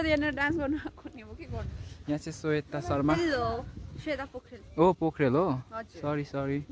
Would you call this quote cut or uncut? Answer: uncut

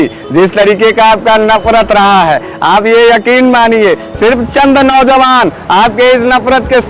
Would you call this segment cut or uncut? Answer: uncut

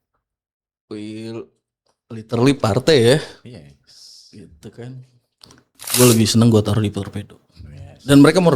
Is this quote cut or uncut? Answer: cut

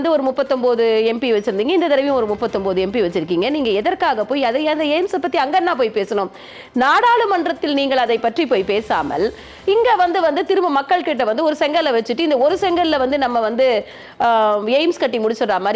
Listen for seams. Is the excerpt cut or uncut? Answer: uncut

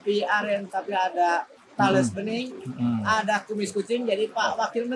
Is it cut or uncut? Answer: uncut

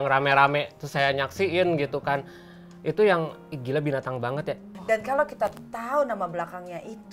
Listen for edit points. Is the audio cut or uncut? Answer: cut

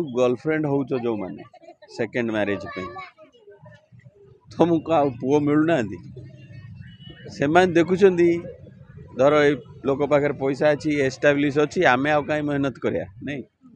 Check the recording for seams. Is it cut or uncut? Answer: uncut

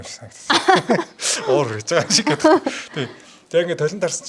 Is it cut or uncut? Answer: uncut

